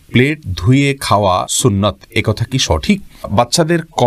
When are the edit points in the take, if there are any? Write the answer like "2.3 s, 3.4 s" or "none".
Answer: 1.5 s, 3.3 s